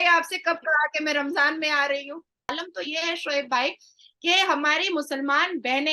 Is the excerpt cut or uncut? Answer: cut